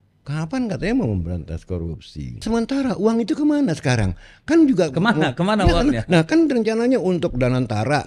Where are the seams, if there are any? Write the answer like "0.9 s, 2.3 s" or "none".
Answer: 2.4 s